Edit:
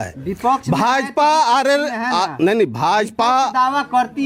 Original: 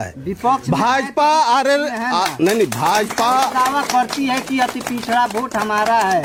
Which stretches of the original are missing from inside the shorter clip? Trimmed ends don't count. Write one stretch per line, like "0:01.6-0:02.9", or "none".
none